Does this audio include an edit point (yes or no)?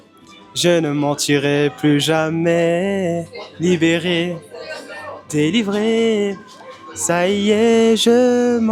no